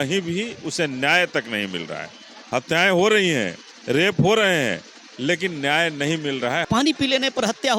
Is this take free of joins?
no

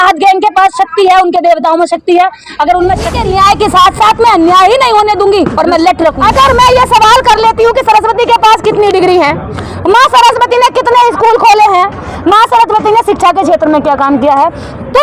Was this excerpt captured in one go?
no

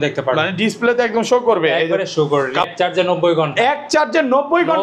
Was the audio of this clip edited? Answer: yes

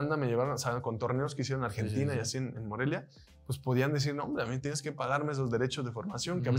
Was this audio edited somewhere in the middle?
no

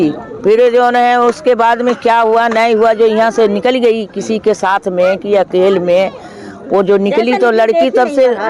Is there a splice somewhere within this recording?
no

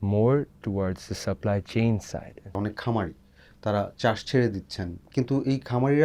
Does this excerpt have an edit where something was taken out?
no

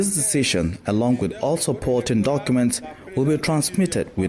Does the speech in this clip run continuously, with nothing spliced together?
yes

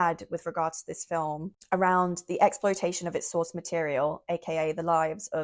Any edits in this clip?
yes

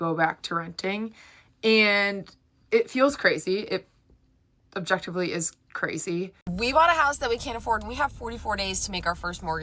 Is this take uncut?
no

